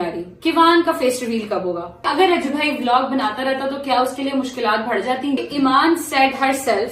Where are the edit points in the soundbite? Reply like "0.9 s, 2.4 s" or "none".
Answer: 2.1 s, 5.4 s